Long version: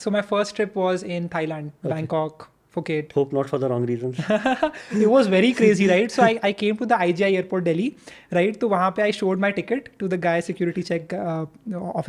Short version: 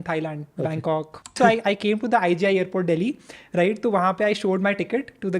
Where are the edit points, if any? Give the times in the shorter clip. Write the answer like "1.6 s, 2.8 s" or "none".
1.3 s